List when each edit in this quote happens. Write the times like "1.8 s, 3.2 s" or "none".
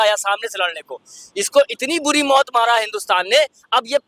none